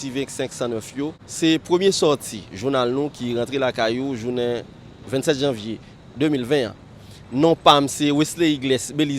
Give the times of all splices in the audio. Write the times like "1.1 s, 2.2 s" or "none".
1.2 s